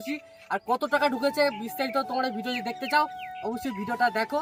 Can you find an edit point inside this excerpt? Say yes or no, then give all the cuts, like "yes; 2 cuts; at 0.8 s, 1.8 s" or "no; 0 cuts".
no; 0 cuts